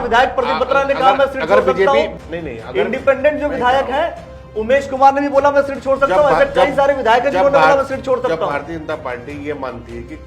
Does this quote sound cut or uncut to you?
cut